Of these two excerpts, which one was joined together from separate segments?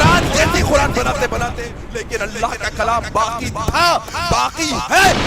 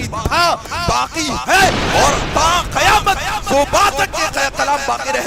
first; 1 cut; at 1.6 s

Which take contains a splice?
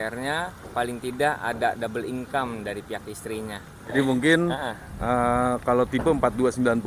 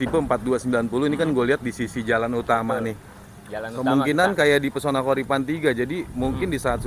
first; 1 cut; at 3.7 s

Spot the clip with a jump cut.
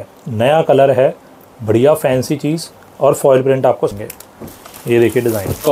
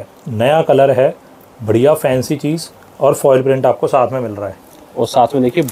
first; 1 cut; at 3.9 s

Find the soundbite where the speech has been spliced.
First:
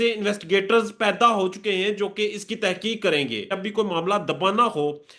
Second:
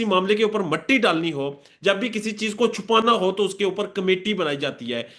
first; 1 cut; at 3.5 s

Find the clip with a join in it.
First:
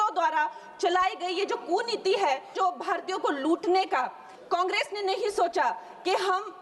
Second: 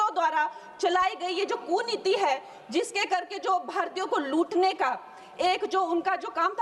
first; 2 cuts; at 2.5 s, 4.3 s

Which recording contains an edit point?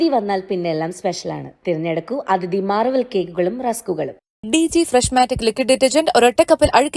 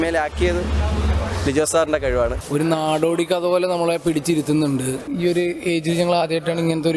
second; 2 cuts; at 2.4 s, 5.1 s

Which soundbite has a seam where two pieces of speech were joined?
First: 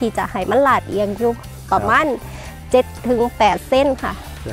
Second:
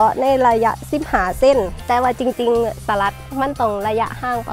second; 1 cut; at 1.8 s

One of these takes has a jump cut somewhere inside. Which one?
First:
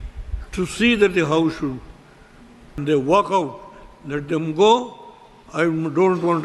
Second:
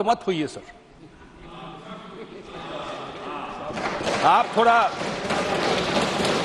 first; 1 cut; at 2.8 s

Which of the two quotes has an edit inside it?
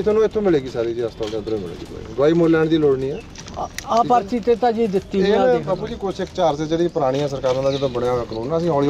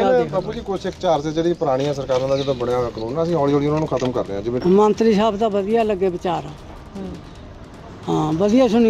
second; 1 cut; at 4.6 s

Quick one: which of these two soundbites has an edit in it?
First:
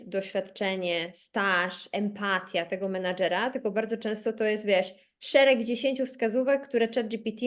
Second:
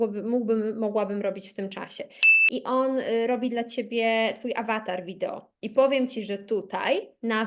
second; 1 cut; at 2.3 s

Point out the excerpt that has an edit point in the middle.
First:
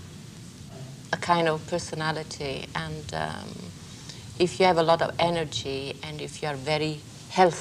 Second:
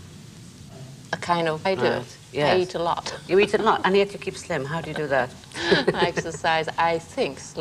first; 1 cut; at 1.6 s

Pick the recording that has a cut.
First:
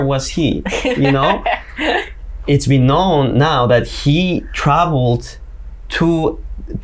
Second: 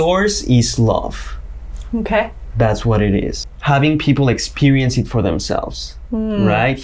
second; 1 cut; at 3.4 s

